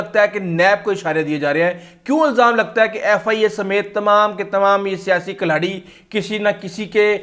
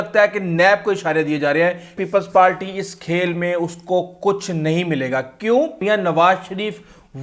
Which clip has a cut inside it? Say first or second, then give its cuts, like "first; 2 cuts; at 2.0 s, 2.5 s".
second; 2 cuts; at 1.9 s, 5.8 s